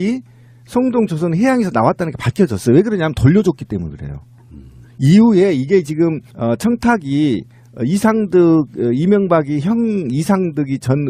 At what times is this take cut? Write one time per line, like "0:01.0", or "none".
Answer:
none